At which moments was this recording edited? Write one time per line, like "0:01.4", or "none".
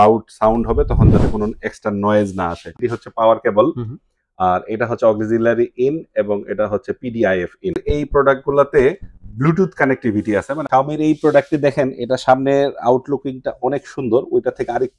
0:02.8
0:07.7
0:10.6